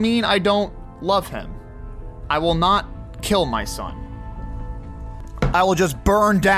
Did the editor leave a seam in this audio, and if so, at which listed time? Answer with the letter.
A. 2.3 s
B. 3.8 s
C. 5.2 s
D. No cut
C